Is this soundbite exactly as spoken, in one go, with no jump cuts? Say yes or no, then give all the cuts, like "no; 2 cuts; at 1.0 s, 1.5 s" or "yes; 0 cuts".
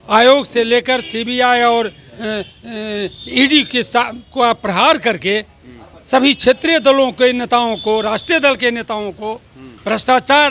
yes; 0 cuts